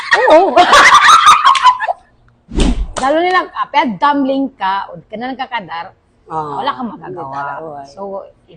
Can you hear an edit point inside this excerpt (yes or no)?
yes